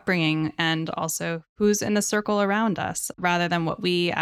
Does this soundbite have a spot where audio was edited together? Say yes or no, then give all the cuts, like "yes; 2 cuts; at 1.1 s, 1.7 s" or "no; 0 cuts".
yes; 2 cuts; at 1.5 s, 3.1 s